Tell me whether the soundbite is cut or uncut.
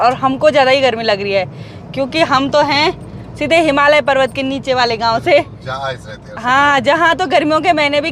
uncut